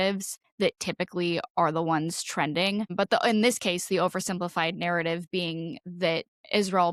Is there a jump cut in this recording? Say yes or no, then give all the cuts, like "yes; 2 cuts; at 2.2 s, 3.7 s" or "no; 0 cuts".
no; 0 cuts